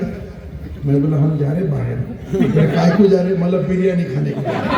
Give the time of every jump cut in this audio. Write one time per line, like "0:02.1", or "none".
none